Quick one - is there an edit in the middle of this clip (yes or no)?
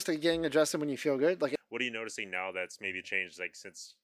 yes